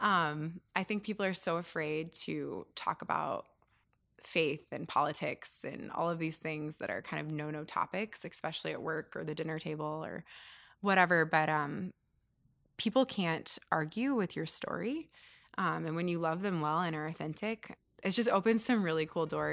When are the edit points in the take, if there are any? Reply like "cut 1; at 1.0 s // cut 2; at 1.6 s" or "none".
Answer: cut 1; at 17.7 s